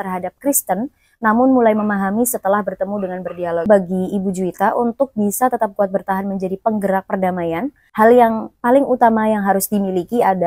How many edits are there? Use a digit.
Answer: 1